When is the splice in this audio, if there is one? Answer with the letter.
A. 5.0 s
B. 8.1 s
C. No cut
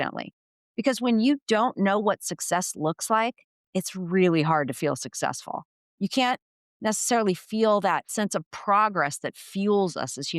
B